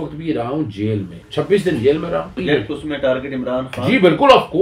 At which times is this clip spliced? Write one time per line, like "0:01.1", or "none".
0:01.2
0:02.4